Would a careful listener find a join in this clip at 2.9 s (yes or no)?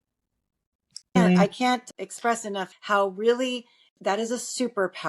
no